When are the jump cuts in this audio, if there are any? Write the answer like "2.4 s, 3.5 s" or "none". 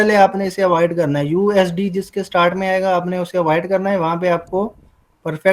none